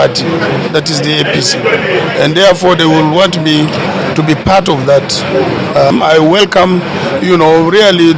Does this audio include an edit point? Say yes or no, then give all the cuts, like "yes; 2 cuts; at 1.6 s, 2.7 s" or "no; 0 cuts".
no; 0 cuts